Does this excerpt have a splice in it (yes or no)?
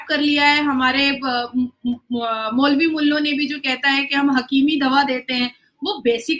no